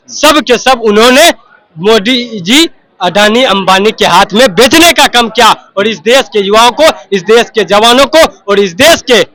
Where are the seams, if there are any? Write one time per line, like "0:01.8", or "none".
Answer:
none